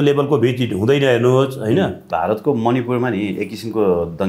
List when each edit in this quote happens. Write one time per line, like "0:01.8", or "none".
0:02.1